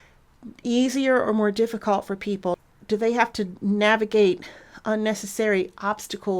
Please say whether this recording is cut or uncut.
cut